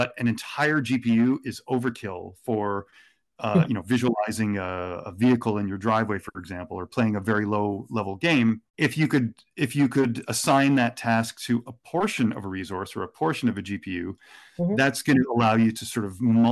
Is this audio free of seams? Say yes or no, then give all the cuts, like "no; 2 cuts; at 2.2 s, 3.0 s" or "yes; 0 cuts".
no; 1 cut; at 8.7 s